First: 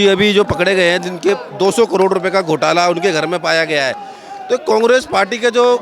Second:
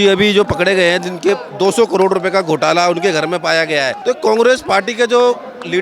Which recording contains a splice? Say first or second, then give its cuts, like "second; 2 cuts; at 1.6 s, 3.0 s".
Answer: second; 1 cut; at 4.0 s